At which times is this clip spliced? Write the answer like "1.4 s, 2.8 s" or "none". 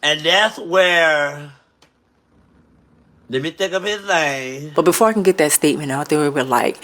4.7 s